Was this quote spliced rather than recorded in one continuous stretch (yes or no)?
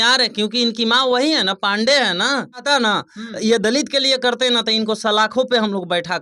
yes